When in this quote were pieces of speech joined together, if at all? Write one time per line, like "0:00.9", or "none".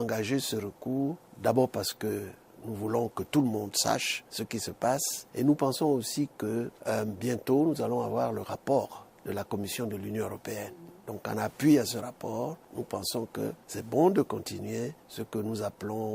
none